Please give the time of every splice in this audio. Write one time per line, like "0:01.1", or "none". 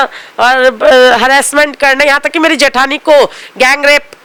none